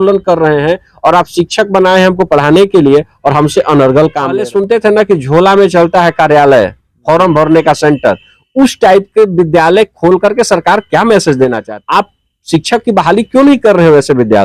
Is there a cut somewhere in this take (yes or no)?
yes